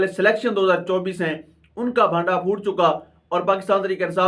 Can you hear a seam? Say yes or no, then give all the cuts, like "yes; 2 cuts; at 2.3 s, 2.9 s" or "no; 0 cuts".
no; 0 cuts